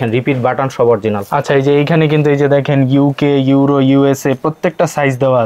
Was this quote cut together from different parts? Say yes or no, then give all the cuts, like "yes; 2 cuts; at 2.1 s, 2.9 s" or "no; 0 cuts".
no; 0 cuts